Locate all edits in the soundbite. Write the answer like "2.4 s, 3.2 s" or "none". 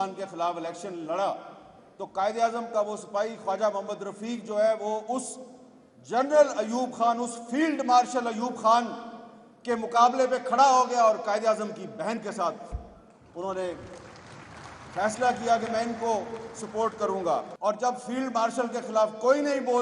17.5 s